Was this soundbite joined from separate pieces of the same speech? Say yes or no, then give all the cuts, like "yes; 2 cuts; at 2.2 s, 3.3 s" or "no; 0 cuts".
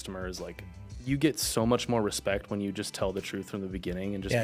no; 0 cuts